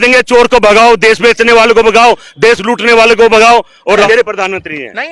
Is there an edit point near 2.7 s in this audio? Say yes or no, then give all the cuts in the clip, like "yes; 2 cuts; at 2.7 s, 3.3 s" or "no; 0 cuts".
no; 1 cut; at 4.0 s